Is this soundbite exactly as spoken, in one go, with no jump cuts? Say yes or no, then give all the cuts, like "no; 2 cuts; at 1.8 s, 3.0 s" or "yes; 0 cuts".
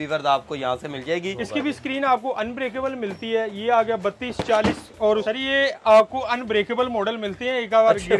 no; 2 cuts; at 1.4 s, 5.2 s